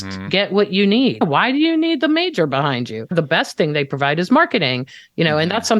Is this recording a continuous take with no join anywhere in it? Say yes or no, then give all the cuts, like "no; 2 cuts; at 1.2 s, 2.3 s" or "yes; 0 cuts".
no; 2 cuts; at 1.2 s, 3.1 s